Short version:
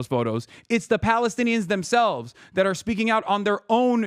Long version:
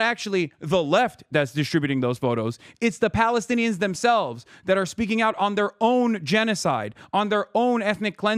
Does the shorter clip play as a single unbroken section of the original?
yes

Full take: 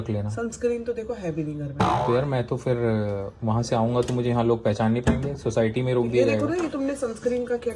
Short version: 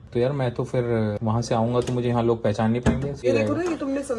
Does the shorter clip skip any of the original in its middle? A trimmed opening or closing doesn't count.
yes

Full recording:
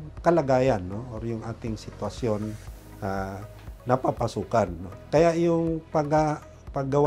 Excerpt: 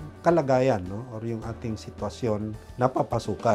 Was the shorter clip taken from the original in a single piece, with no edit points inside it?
no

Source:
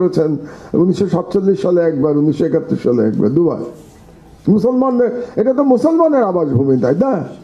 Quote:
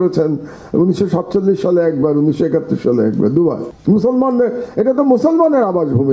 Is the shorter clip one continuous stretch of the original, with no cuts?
no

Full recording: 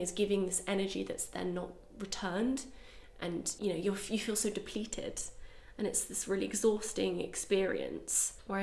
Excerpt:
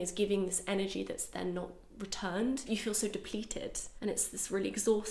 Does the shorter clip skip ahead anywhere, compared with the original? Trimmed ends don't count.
yes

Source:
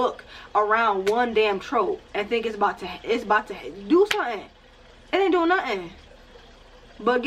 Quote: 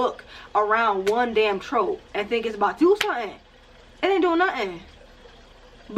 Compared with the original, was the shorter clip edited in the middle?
yes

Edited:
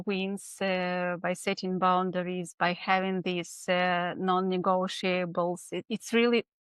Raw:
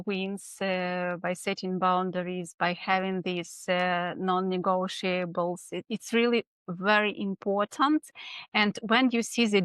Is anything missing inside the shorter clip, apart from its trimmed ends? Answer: no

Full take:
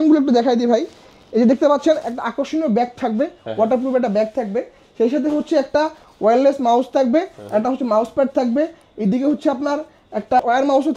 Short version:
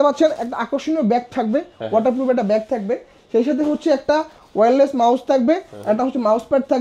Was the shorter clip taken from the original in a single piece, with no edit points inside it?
yes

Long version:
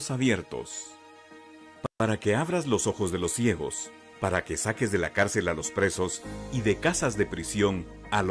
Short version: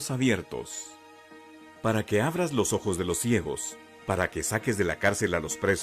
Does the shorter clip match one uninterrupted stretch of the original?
no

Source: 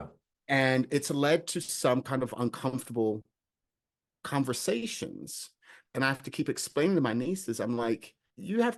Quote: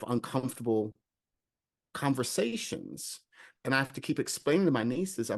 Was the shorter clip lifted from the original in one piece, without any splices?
yes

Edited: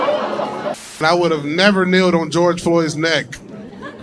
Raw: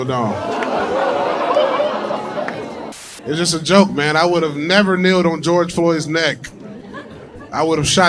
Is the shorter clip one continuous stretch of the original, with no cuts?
no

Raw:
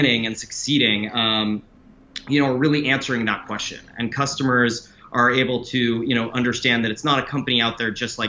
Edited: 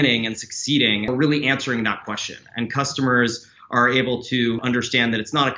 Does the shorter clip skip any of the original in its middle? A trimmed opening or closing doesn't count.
yes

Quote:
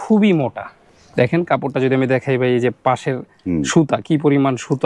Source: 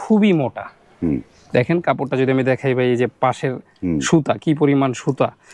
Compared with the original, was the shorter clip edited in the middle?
yes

